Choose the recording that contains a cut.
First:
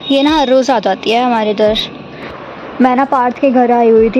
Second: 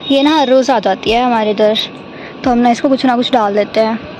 first; 1 cut; at 2.3 s

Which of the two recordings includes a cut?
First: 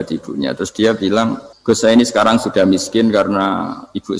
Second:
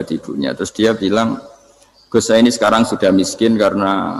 first; 1 cut; at 1.5 s

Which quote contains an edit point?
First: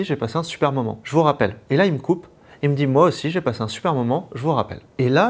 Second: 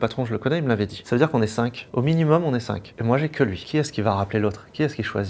second; 1 cut; at 3.6 s

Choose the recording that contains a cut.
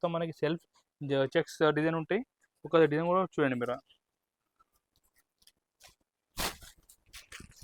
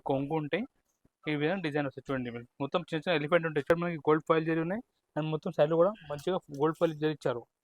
second; 1 cut; at 3.7 s

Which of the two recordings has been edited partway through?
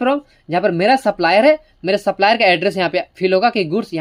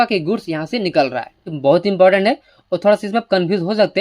second; 1 cut; at 1.5 s

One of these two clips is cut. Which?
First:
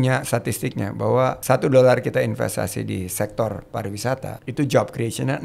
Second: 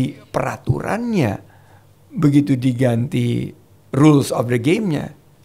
first; 2 cuts; at 1.4 s, 4.4 s

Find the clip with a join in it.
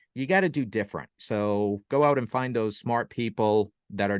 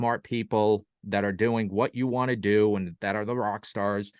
first; 1 cut; at 1.2 s

